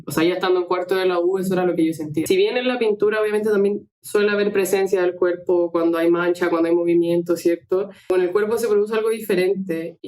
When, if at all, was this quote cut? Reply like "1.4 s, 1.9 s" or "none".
2.2 s, 8.1 s